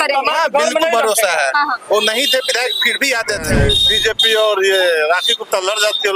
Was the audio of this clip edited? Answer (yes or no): yes